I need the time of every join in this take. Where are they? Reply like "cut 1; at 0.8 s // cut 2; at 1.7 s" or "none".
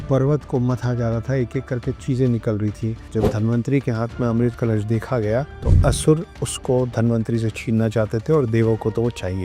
cut 1; at 3.0 s